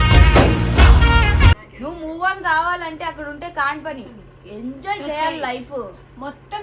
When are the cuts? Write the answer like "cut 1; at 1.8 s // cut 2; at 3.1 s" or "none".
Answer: cut 1; at 1.7 s